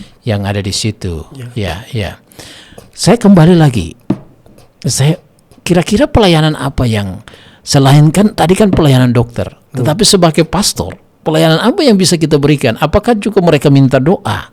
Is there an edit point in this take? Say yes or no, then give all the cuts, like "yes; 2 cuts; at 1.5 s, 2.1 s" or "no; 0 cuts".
no; 0 cuts